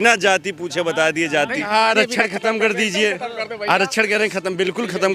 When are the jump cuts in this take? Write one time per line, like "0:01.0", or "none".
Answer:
0:01.7

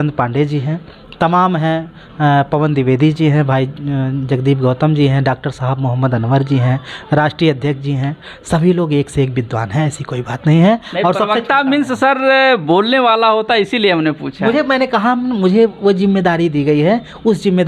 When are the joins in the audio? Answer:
none

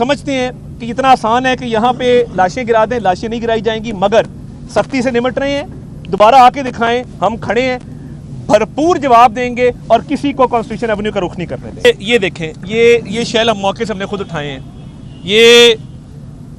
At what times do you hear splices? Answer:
0:11.8

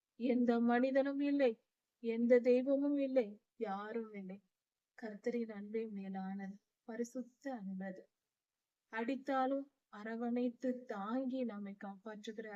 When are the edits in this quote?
none

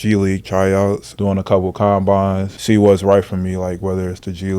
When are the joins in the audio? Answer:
0:01.1
0:02.5

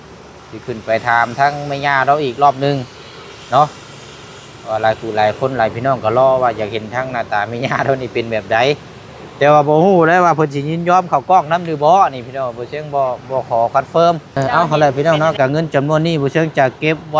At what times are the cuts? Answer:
0:14.3

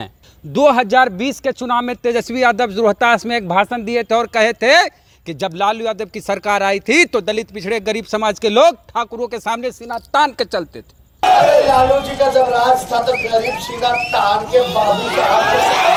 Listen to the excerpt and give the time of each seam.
none

